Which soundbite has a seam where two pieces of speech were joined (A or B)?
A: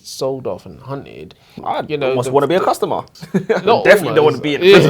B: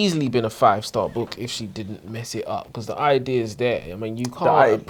A